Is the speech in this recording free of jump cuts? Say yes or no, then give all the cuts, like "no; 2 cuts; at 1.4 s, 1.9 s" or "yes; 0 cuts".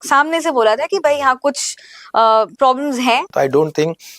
no; 1 cut; at 3.3 s